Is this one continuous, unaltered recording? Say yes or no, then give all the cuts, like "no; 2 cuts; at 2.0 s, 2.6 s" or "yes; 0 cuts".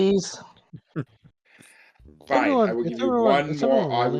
yes; 0 cuts